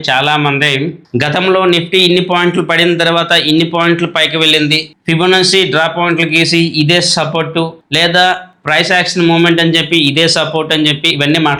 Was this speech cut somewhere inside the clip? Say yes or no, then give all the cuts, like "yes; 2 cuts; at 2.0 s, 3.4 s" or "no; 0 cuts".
no; 0 cuts